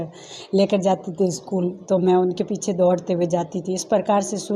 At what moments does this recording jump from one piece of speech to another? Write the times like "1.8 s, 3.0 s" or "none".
none